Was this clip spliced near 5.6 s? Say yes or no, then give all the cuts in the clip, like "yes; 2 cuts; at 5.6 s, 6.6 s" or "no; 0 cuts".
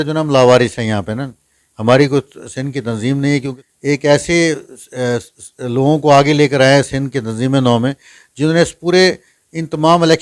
no; 1 cut; at 3.6 s